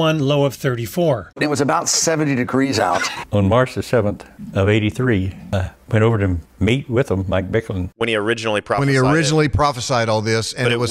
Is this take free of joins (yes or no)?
no